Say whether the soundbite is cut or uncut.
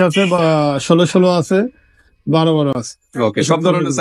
uncut